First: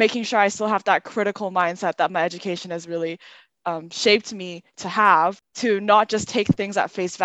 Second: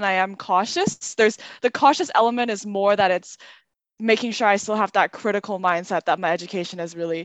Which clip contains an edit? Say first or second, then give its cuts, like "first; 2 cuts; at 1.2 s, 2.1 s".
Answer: first; 1 cut; at 5.5 s